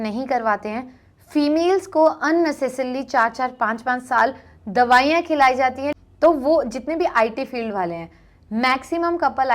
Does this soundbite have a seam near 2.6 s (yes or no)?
no